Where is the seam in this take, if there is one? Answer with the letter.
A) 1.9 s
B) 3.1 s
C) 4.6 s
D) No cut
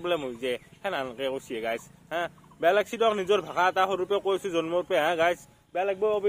D